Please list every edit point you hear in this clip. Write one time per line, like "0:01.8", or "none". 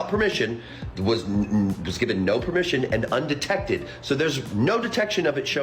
none